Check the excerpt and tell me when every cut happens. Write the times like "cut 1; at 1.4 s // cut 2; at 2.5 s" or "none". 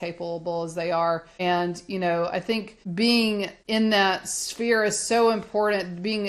cut 1; at 1.3 s // cut 2; at 2.8 s // cut 3; at 3.6 s